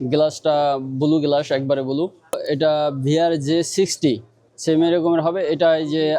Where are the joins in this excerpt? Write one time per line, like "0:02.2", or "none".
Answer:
0:02.4